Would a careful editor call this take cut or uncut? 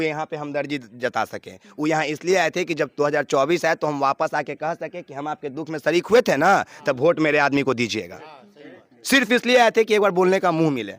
uncut